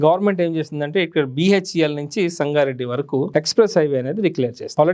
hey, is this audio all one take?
yes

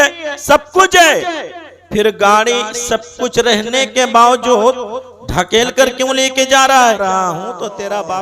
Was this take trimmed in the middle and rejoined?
yes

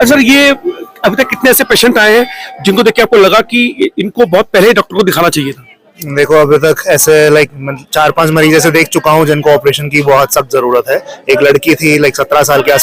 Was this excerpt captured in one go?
yes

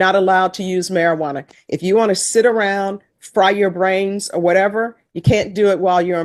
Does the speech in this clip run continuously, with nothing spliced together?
yes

